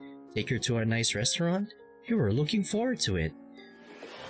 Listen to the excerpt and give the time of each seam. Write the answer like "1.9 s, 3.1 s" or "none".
none